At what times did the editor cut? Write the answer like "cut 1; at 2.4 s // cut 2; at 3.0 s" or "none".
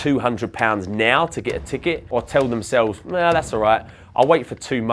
cut 1; at 2.0 s